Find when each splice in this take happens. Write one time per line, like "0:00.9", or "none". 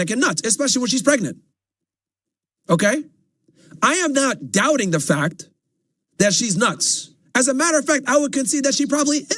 none